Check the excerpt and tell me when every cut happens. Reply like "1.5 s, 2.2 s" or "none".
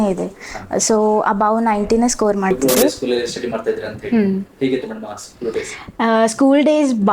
2.6 s